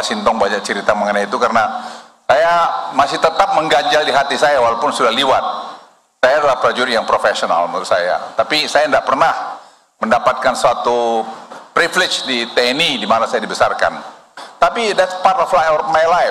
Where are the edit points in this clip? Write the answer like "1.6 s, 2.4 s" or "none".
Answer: none